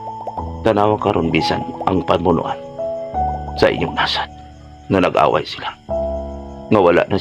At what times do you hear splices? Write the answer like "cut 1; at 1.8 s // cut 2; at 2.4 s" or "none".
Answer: none